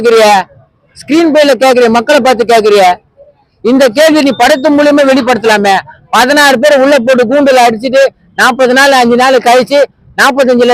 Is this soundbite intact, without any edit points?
yes; 0 cuts

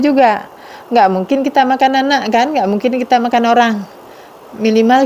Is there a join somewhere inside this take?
no; 0 cuts

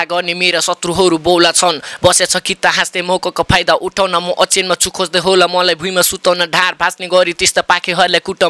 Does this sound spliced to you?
no; 0 cuts

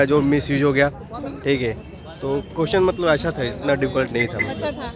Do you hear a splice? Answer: no; 0 cuts

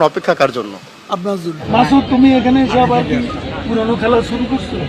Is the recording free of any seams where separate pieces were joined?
no; 1 cut; at 1.6 s

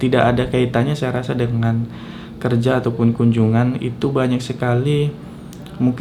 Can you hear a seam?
no; 0 cuts

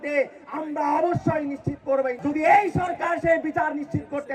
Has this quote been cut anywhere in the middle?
yes; 1 cut; at 2.2 s

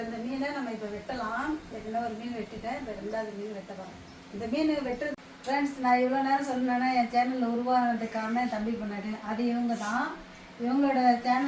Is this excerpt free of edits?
no; 1 cut; at 5.1 s

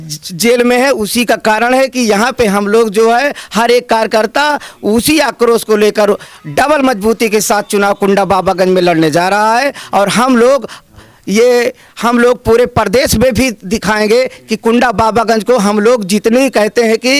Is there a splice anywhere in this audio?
no; 0 cuts

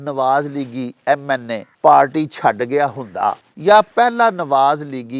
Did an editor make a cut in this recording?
yes; 2 cuts; at 1.6 s, 3.5 s

